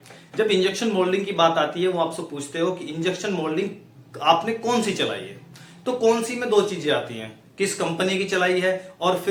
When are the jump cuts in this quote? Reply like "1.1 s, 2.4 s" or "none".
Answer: none